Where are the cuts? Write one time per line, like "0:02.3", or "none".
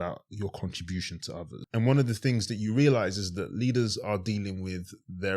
0:01.5